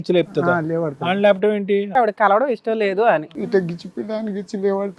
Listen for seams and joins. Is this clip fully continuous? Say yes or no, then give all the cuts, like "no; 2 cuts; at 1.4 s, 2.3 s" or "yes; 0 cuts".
no; 2 cuts; at 1.9 s, 3.3 s